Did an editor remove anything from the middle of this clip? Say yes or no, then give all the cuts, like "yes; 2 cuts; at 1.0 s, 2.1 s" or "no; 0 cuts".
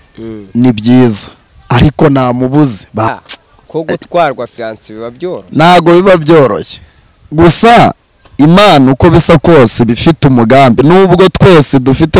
yes; 1 cut; at 3.1 s